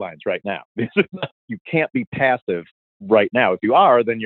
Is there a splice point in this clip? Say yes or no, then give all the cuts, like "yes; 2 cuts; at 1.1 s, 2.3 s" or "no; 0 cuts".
yes; 2 cuts; at 1.4 s, 2.9 s